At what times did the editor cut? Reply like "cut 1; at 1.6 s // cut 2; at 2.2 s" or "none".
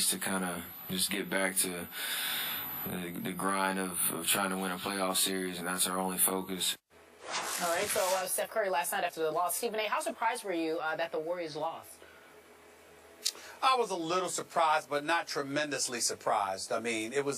cut 1; at 9.5 s

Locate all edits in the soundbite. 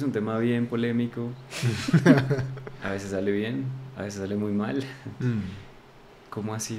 none

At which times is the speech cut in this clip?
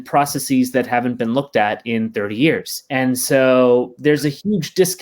cut 1; at 2.7 s

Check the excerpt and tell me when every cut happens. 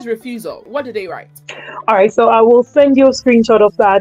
none

